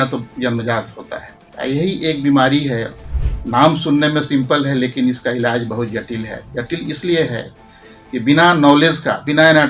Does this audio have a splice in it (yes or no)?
yes